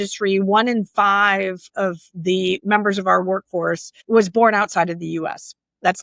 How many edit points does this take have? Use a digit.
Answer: 2